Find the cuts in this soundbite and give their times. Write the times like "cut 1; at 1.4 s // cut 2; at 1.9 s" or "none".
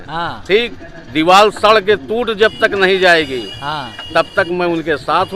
none